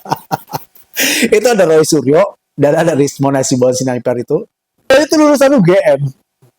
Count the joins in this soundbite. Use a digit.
1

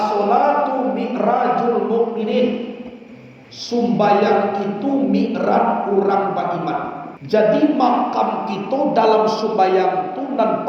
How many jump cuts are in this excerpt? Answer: 1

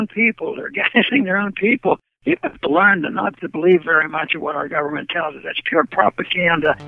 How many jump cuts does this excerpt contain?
0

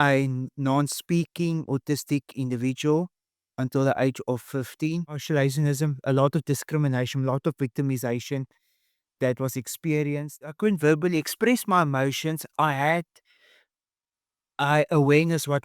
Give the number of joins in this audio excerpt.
2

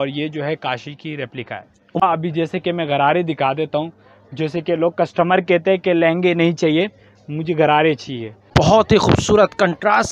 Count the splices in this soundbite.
2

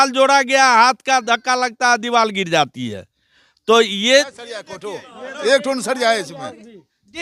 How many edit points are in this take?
1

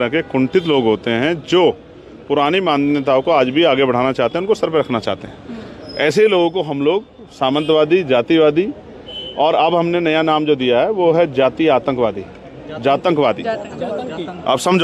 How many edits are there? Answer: 0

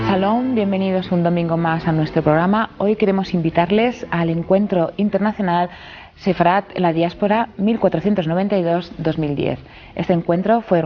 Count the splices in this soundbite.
0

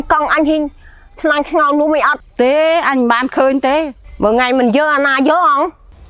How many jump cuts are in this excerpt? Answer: 2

